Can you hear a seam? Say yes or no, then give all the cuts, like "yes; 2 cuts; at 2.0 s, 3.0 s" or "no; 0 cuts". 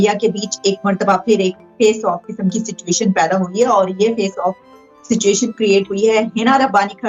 no; 0 cuts